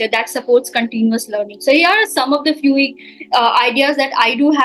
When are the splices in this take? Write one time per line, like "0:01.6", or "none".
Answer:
none